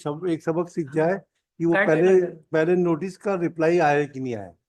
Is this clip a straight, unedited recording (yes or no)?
yes